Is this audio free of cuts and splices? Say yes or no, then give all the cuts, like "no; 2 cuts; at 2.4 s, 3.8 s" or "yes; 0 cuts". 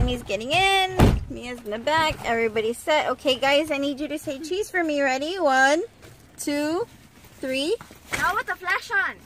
yes; 0 cuts